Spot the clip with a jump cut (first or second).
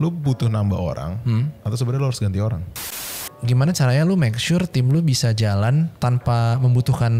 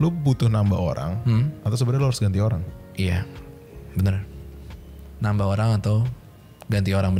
first